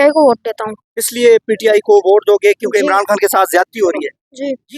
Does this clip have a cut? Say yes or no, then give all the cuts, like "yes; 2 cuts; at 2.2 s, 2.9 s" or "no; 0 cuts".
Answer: no; 0 cuts